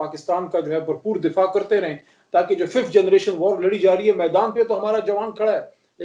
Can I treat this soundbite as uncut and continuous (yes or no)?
yes